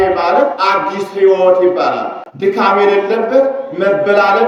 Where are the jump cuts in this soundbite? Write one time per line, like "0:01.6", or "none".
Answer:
none